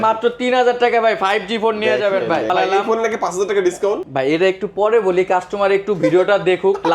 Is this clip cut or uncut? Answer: cut